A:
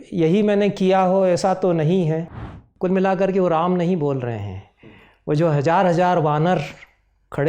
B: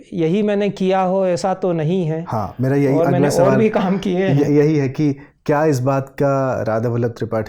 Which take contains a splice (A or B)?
A